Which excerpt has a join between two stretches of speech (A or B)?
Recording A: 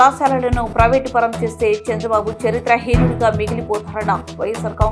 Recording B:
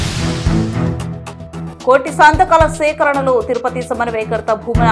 B